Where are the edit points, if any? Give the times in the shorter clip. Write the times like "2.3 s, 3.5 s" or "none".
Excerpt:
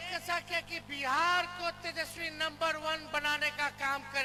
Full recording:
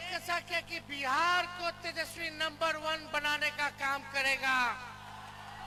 none